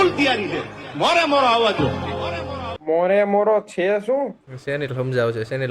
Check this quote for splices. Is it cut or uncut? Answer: cut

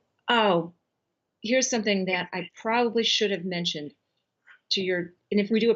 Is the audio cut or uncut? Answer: uncut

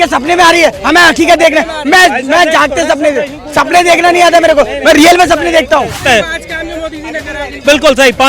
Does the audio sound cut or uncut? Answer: cut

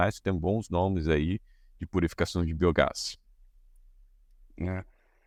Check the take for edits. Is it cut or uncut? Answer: uncut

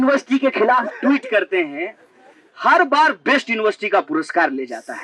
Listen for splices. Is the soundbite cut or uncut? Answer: uncut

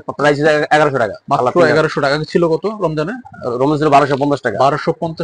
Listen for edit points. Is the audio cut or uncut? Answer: uncut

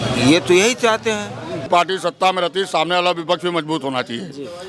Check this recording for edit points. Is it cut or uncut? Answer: cut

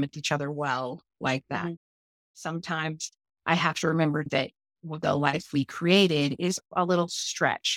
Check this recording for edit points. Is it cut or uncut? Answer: cut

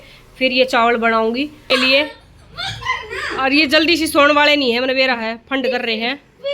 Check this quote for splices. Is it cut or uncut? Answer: cut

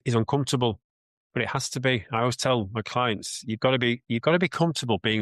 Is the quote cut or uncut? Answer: uncut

